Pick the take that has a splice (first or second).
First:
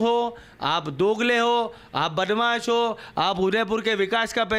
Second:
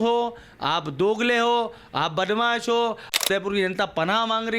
second